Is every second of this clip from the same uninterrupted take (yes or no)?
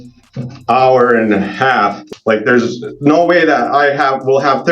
no